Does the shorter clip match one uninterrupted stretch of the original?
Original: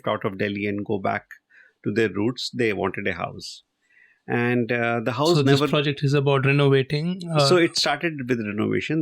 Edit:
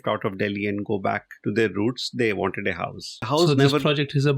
no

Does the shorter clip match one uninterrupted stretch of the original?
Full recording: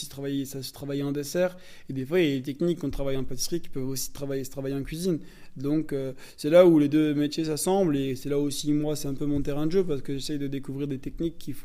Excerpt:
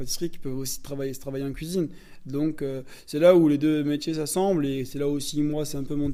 yes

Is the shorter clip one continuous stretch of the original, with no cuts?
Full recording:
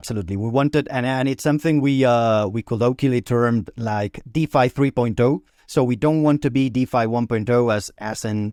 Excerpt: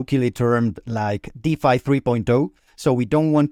yes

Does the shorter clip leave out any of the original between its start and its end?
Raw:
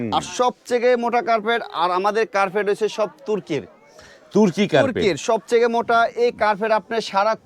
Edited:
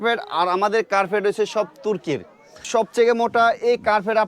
yes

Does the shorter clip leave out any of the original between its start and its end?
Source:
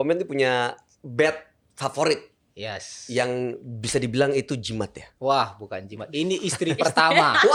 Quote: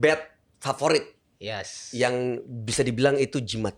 no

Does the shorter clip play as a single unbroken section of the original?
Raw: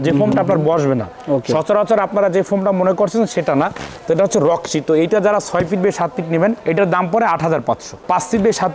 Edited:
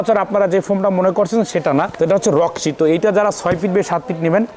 no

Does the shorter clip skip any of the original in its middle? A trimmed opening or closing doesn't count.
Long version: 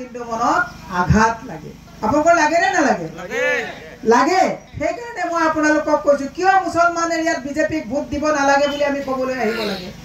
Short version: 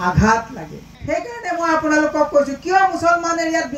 yes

